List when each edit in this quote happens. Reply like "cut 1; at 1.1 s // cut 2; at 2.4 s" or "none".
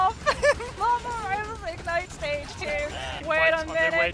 cut 1; at 3.2 s